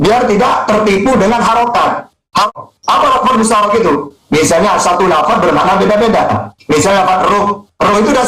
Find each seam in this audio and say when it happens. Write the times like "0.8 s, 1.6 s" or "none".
2.5 s